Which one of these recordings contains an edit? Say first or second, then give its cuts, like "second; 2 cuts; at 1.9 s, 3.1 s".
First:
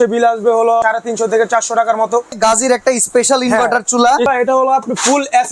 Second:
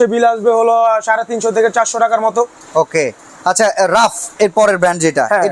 first; 3 cuts; at 0.8 s, 2.4 s, 4.3 s